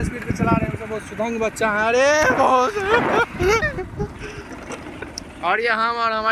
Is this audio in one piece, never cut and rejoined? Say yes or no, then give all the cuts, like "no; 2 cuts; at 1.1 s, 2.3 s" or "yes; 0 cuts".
yes; 0 cuts